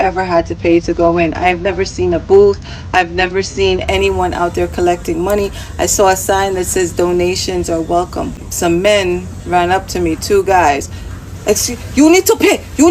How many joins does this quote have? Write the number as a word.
one